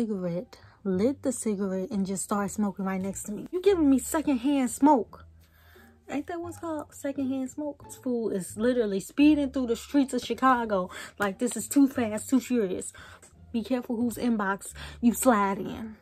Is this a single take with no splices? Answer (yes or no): no